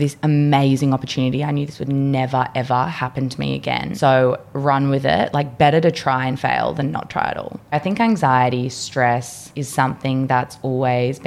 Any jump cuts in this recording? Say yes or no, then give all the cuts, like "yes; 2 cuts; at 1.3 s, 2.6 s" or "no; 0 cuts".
yes; 2 cuts; at 3.9 s, 7.7 s